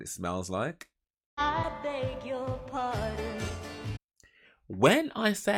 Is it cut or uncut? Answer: uncut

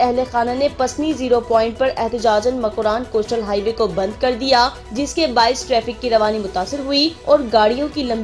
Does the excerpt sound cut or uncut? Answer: cut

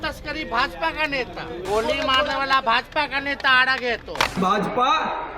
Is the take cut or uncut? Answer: cut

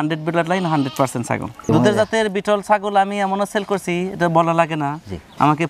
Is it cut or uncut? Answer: cut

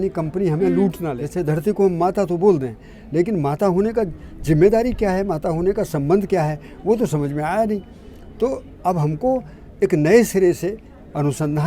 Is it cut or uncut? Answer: cut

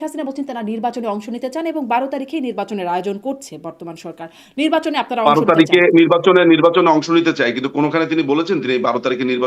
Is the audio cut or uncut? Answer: uncut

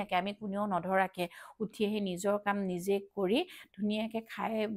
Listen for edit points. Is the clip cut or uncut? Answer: uncut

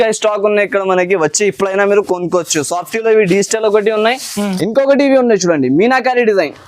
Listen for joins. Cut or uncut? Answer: cut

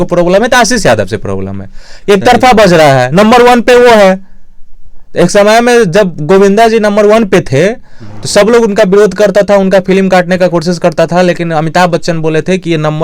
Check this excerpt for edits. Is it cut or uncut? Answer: uncut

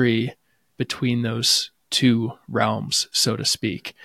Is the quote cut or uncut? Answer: uncut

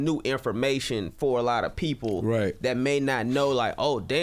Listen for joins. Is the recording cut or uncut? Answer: uncut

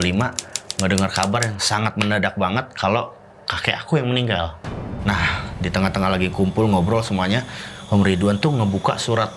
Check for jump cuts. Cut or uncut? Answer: cut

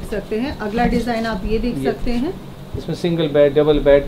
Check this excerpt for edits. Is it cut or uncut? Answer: uncut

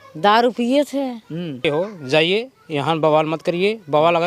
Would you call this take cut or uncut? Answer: cut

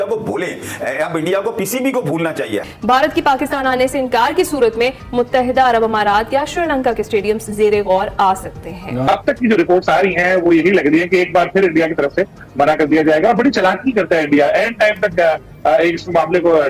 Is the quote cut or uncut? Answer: cut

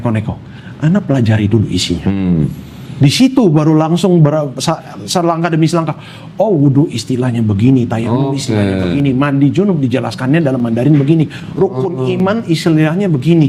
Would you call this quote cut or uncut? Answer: uncut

